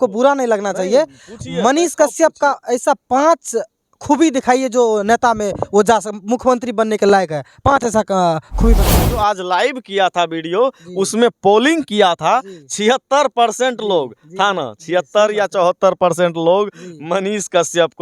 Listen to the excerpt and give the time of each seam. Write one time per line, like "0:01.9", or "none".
0:08.8